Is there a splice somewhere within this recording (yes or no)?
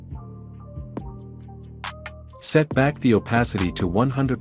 yes